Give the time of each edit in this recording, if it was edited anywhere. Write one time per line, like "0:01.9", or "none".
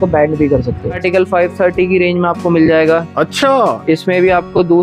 0:01.0